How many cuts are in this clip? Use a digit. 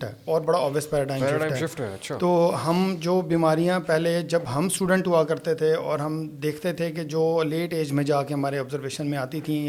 0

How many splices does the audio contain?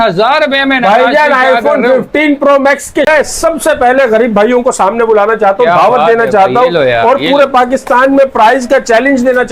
1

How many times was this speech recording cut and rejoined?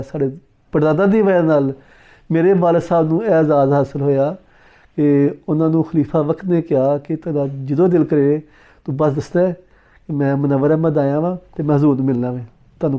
1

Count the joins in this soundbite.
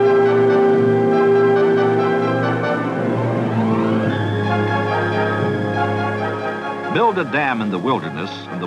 1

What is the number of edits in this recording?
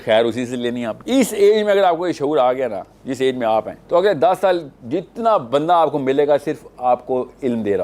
2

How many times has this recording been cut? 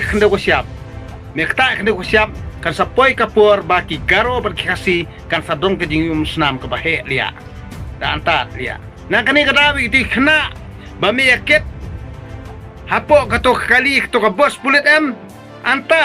1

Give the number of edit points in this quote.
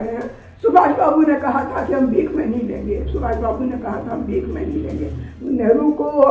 1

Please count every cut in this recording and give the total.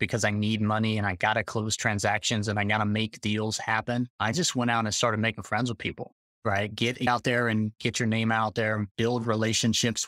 1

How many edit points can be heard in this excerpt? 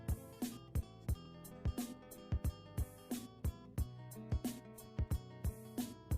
2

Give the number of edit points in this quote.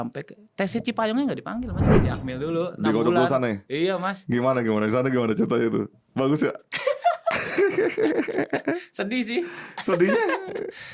1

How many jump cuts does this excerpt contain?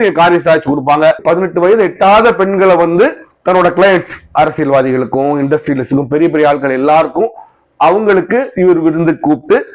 1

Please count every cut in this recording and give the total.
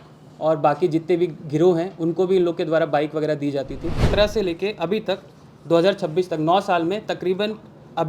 1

